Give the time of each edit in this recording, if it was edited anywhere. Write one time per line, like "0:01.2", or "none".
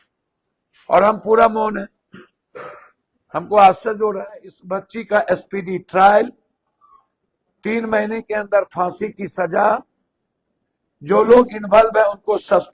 0:04.6